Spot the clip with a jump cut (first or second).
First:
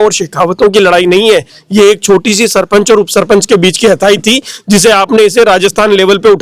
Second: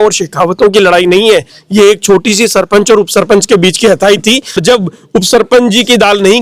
second